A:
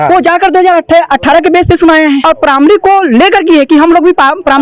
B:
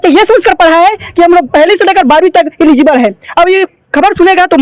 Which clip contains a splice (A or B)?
A